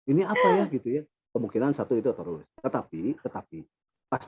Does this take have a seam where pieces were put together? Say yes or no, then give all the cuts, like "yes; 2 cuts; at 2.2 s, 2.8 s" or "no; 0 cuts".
no; 0 cuts